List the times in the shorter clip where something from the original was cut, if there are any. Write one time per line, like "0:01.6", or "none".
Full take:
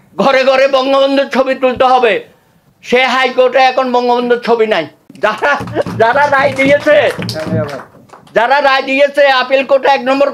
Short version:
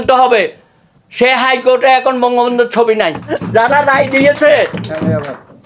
0:03.3